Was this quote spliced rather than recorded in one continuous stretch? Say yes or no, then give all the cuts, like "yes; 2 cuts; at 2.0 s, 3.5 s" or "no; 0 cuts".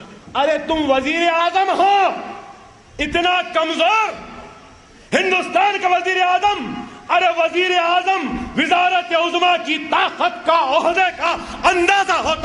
no; 0 cuts